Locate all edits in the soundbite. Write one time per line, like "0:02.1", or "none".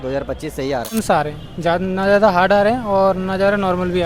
0:00.9